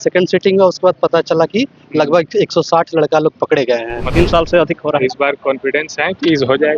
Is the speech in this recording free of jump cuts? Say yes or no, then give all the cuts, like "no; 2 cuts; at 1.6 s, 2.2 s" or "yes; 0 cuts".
no; 1 cut; at 4.0 s